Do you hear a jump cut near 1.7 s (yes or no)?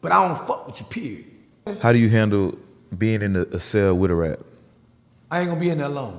yes